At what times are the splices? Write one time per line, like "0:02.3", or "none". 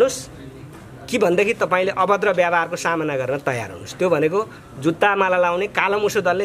none